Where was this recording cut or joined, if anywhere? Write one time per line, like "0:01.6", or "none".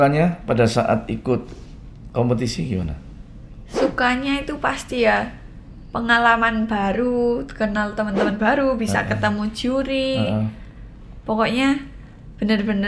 none